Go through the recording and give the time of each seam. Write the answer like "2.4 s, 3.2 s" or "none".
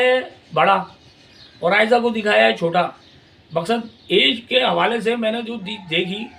none